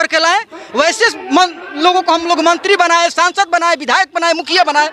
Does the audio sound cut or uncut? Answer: uncut